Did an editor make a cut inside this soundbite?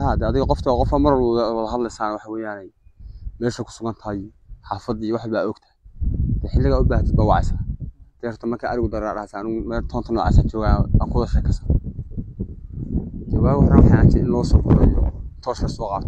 no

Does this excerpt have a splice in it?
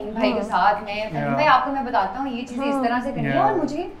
no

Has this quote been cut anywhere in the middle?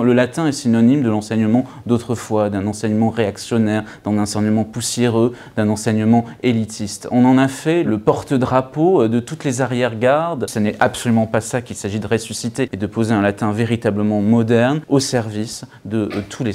yes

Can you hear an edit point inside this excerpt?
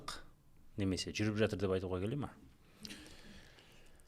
no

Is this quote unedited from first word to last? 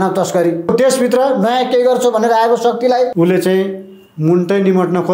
no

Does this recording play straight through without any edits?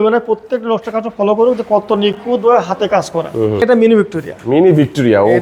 no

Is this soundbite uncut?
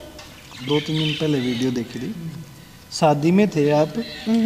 yes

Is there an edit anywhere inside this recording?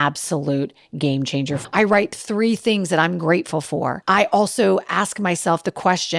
yes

